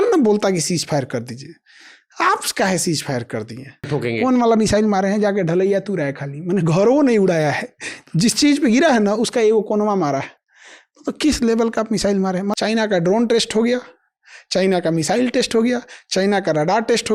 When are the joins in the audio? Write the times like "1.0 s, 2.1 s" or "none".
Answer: 3.9 s, 12.5 s